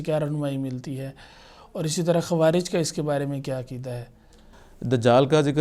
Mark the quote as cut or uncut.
uncut